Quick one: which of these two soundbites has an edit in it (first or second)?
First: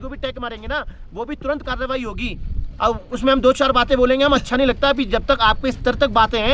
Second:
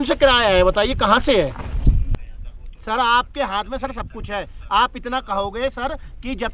second